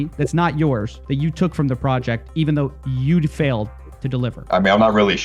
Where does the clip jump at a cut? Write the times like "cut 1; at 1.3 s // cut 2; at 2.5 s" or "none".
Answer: cut 1; at 0.9 s // cut 2; at 4.4 s